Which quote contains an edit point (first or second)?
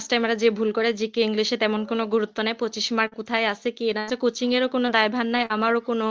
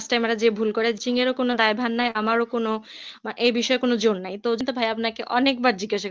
second